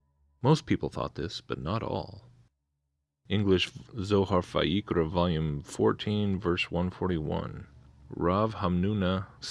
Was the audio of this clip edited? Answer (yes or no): no